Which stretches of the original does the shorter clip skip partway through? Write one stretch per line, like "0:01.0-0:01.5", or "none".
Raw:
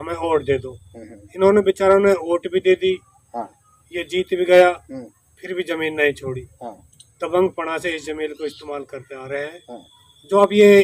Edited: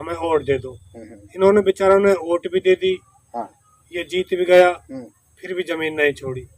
none

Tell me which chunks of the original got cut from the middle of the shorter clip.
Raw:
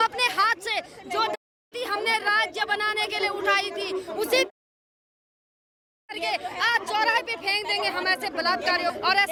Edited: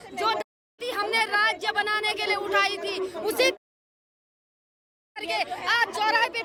none

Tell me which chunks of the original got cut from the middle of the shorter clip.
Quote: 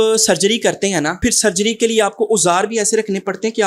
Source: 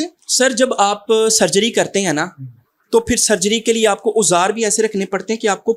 0:02.3-0:03.0

